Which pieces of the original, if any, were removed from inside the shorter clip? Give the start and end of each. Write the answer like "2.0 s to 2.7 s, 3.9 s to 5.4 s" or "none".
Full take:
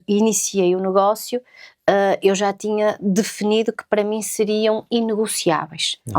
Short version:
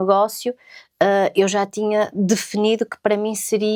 none